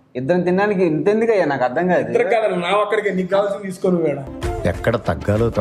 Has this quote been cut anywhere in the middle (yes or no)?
no